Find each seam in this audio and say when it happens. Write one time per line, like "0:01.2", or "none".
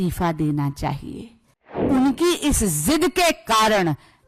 0:01.8